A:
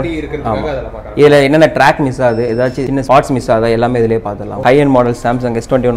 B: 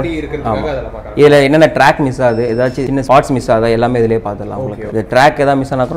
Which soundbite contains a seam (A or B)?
A